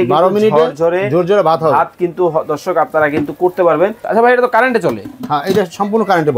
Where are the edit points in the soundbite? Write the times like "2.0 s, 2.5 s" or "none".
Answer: 4.0 s